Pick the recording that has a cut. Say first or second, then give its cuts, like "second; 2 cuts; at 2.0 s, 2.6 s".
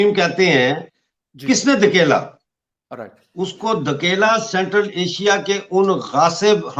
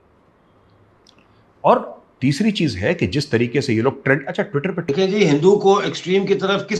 second; 1 cut; at 4.9 s